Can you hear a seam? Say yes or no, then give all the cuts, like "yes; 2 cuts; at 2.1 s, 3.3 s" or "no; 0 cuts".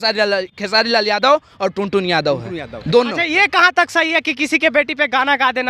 no; 0 cuts